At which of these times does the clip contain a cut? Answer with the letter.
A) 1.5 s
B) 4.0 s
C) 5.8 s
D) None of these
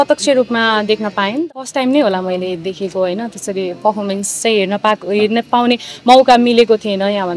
A